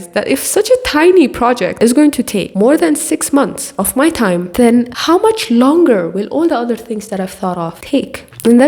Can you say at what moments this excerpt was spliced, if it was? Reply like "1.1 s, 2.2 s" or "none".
1.7 s, 4.5 s